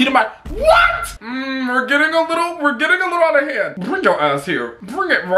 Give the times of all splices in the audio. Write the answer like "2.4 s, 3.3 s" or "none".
1.0 s